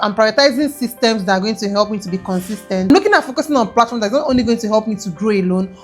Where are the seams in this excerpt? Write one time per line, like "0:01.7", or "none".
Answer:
0:02.9